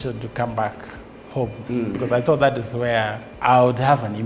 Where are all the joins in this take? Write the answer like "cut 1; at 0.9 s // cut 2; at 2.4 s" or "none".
cut 1; at 3.2 s